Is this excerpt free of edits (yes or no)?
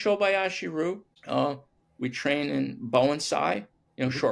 no